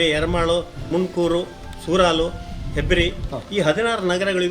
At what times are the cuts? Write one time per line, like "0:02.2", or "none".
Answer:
0:00.9
0:03.3